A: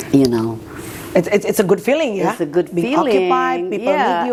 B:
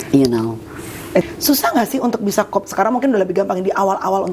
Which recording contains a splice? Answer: B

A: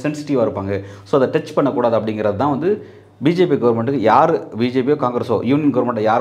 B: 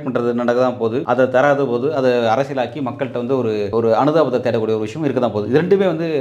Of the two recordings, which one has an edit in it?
B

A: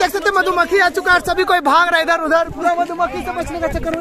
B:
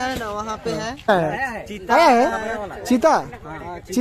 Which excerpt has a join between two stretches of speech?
B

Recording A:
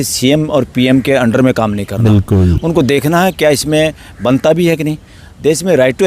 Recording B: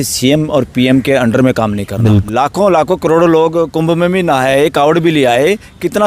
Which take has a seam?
B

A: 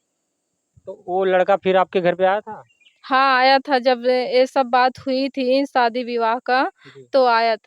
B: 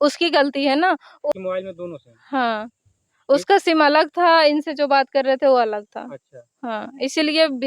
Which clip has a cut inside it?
B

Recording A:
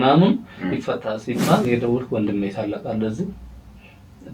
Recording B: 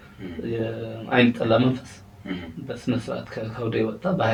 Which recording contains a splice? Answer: A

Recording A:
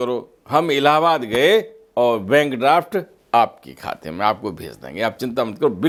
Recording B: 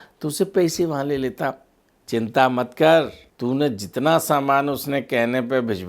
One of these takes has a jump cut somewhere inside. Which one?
B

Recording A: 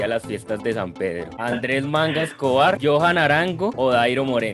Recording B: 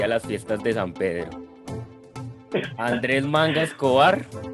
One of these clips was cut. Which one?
A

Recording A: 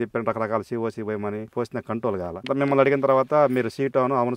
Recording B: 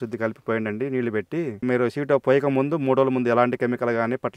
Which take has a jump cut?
A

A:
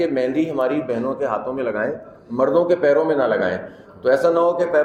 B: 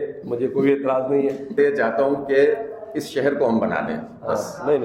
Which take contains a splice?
B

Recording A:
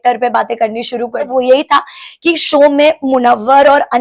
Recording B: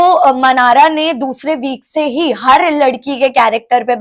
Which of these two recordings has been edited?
A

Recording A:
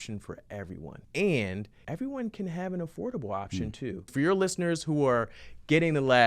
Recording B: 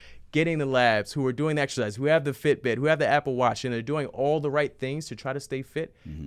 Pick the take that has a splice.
A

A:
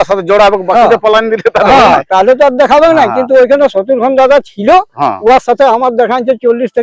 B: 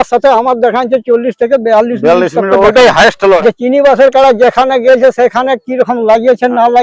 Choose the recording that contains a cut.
B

